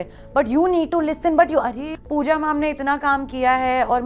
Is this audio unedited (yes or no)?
no